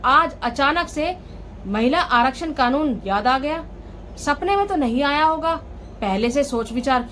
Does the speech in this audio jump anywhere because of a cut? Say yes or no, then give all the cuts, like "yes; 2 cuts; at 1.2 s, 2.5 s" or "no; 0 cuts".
no; 0 cuts